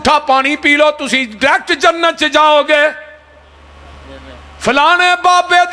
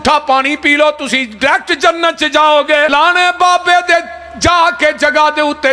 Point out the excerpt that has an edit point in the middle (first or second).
second